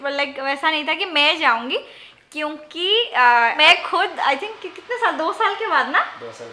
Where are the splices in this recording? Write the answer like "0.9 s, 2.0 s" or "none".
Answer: 3.6 s